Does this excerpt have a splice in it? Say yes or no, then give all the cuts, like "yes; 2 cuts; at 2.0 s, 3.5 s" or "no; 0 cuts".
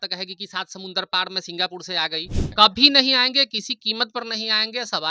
yes; 1 cut; at 2.5 s